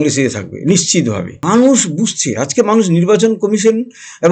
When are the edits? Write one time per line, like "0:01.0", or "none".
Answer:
0:01.4